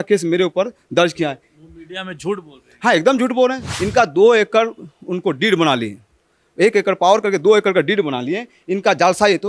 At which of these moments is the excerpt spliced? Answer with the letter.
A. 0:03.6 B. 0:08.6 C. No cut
A